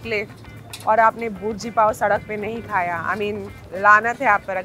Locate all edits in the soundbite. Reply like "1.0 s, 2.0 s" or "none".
none